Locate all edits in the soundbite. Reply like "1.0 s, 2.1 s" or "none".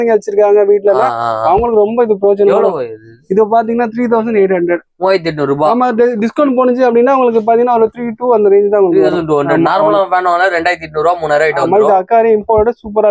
none